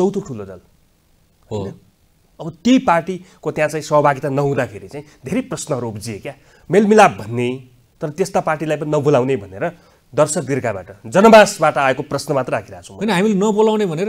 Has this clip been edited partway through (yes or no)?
no